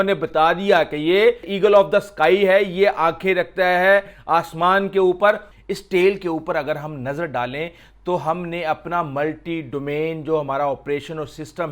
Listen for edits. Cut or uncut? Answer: cut